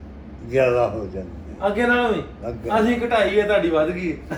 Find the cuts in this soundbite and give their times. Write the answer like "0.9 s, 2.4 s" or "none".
none